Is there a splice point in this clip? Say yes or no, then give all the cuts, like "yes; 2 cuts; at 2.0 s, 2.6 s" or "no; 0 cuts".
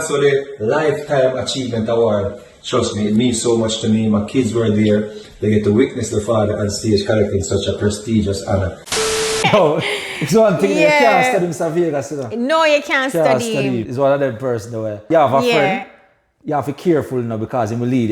yes; 3 cuts; at 9.3 s, 13.9 s, 15.0 s